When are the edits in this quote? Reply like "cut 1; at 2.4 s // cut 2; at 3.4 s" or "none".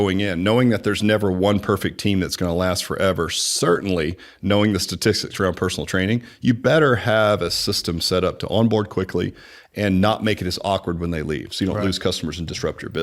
none